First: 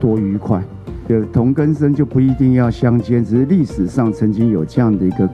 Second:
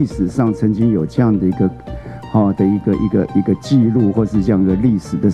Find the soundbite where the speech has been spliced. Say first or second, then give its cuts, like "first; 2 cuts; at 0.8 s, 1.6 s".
first; 1 cut; at 1.0 s